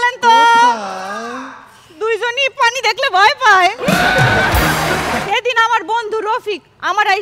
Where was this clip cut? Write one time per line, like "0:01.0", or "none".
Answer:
0:05.2